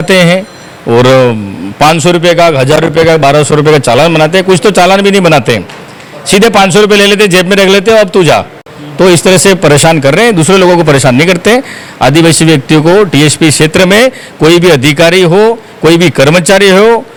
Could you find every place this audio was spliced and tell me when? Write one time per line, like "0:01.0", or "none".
none